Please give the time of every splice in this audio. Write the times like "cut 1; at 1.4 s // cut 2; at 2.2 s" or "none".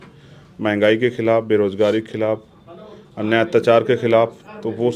none

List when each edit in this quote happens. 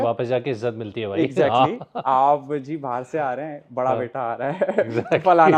none

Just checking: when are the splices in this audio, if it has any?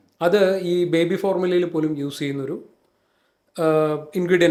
none

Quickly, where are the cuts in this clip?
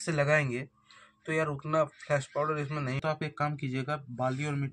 cut 1; at 3.0 s

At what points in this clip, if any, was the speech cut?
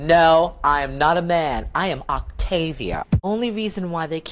cut 1; at 3.2 s

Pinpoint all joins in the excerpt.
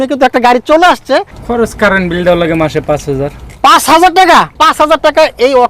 cut 1; at 1.4 s // cut 2; at 4.5 s

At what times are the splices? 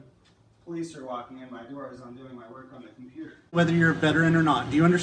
cut 1; at 3.6 s

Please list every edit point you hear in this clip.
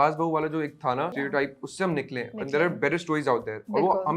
cut 1; at 1.1 s

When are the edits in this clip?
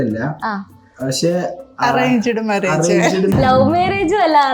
cut 1; at 3.3 s

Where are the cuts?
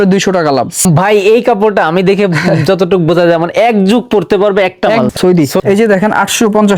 cut 1; at 0.9 s // cut 2; at 5.2 s

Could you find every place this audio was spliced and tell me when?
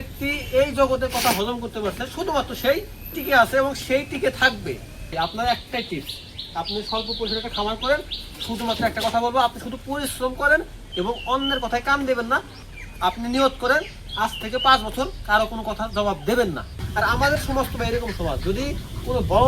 cut 1; at 5.1 s // cut 2; at 12.4 s // cut 3; at 16.8 s

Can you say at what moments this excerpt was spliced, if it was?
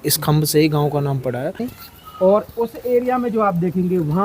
cut 1; at 1.7 s

